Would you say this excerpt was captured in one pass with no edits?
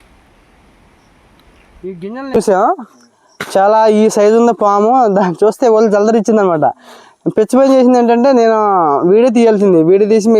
no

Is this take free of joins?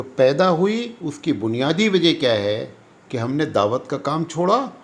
yes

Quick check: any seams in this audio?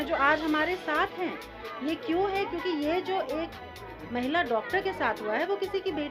no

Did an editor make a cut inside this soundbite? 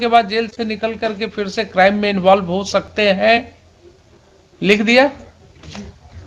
no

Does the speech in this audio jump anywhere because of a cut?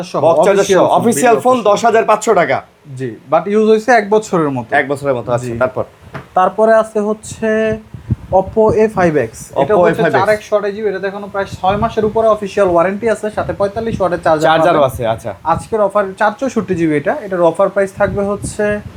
no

